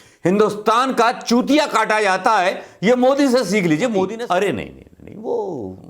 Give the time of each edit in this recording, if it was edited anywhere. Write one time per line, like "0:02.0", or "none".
0:04.2